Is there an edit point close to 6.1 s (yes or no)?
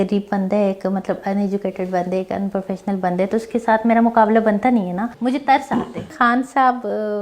yes